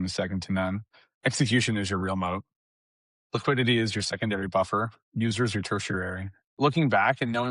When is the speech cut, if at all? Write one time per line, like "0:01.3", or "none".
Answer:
0:06.6